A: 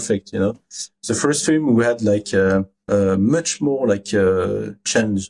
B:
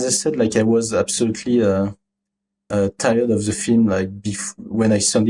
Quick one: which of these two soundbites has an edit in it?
A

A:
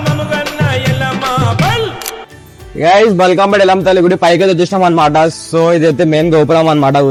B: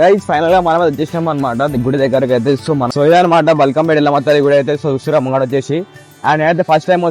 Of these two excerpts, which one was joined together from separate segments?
B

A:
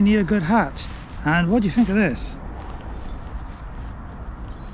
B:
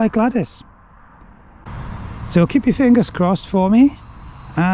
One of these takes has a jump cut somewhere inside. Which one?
B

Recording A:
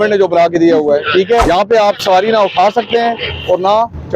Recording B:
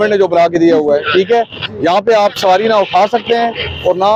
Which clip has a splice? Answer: A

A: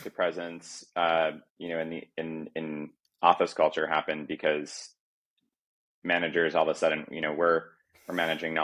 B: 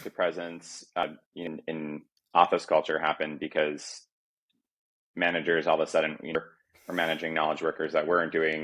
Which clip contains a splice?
B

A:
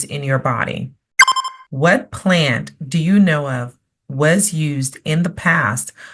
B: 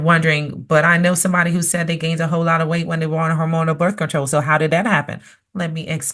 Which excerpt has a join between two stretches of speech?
A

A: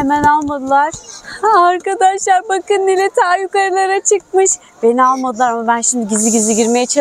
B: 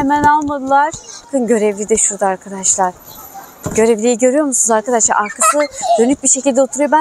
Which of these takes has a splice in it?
B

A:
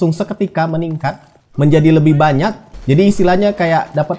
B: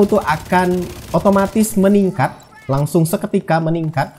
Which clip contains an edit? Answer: A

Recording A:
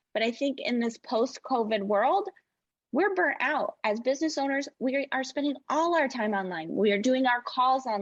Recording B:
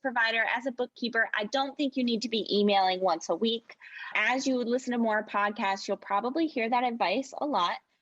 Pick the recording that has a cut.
B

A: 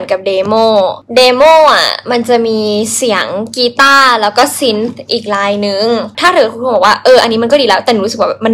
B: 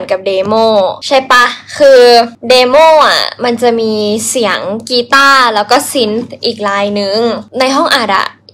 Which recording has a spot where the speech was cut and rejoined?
A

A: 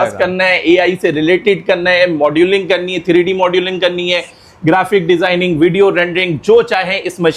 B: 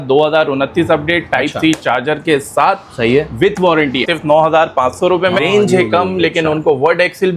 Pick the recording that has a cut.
B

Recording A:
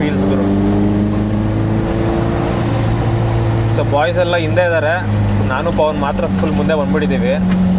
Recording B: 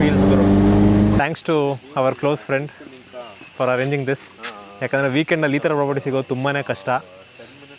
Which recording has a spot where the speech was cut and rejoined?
B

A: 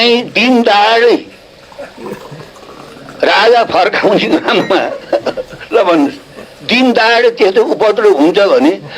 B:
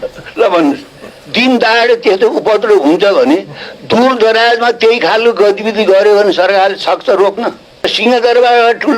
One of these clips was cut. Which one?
B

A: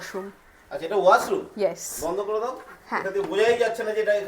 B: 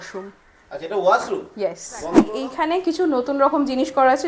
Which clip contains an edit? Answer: B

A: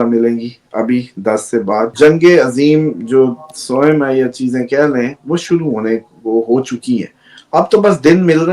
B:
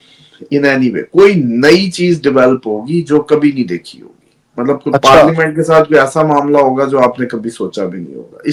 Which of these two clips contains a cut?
A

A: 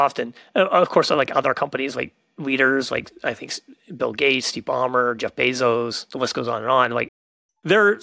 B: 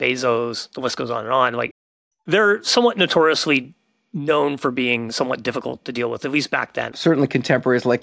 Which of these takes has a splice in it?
B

